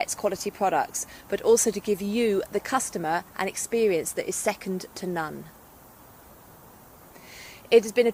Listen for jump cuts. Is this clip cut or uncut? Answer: uncut